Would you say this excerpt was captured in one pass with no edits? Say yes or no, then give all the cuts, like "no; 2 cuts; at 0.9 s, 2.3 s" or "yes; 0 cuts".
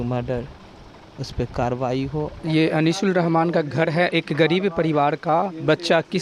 no; 1 cut; at 2.4 s